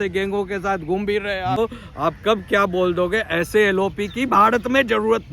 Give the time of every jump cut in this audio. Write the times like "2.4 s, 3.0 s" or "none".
1.6 s